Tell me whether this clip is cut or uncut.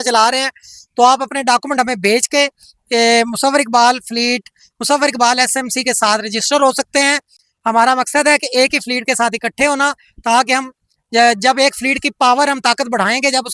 uncut